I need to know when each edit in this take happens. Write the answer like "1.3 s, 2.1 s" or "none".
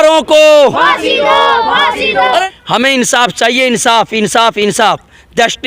2.4 s